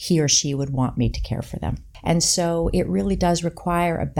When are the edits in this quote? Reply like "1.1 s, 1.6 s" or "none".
1.9 s